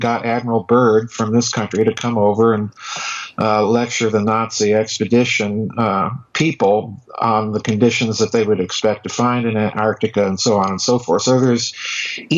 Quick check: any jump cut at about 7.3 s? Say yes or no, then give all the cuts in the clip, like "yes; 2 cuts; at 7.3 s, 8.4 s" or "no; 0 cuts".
no; 1 cut; at 2.0 s